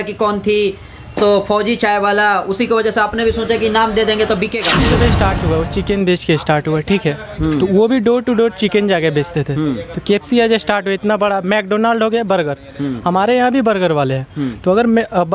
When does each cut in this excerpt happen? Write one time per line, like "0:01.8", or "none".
0:04.9